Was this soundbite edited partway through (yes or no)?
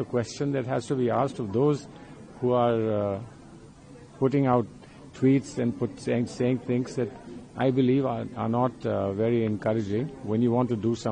no